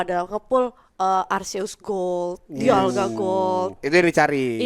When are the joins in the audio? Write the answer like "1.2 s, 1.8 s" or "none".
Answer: none